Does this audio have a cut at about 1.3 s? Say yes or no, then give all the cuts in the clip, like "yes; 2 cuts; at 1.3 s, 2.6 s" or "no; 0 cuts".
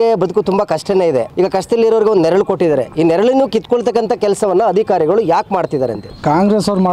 yes; 2 cuts; at 1.3 s, 6.1 s